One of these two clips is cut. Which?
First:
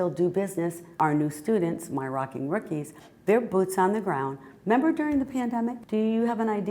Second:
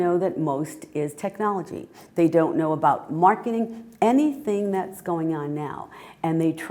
first; 2 cuts; at 0.9 s, 5.8 s

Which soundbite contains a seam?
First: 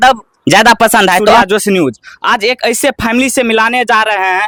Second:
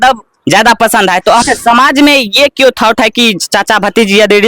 second; 1 cut; at 1.4 s

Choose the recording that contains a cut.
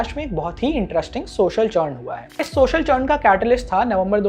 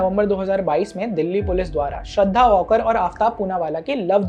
first; 1 cut; at 2.4 s

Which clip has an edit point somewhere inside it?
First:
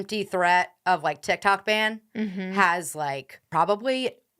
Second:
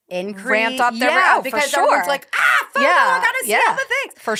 first; 1 cut; at 3.3 s

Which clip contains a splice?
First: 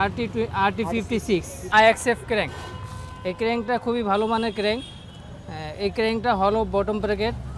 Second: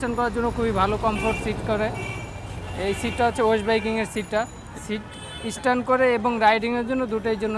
first; 1 cut; at 1.7 s

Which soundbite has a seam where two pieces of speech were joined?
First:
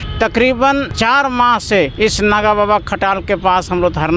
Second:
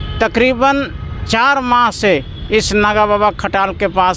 first; 2 cuts; at 0.9 s, 1.9 s

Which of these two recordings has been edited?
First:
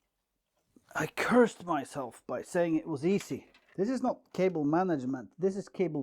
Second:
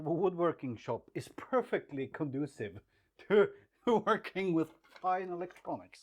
first; 1 cut; at 3.7 s

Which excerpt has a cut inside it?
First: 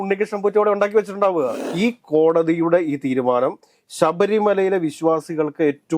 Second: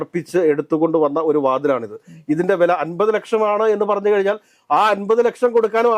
first; 1 cut; at 1.6 s

